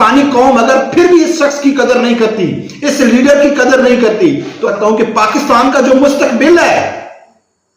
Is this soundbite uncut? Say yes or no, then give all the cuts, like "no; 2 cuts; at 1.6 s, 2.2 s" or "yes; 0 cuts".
no; 1 cut; at 4.7 s